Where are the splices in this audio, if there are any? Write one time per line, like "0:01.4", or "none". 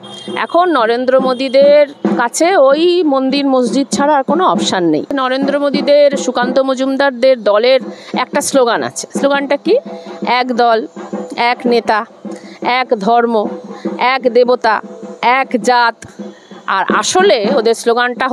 0:05.2